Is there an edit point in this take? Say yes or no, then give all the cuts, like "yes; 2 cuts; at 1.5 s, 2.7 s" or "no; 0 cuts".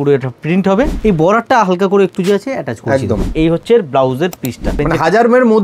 yes; 3 cuts; at 0.9 s, 3.3 s, 4.8 s